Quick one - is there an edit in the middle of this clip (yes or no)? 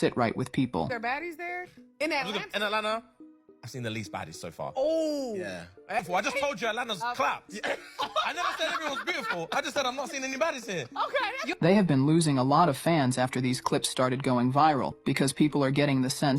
yes